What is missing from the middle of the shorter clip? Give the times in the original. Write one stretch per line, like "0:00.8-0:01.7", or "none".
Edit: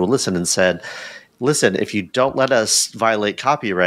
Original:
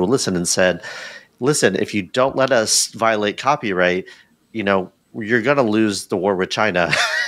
none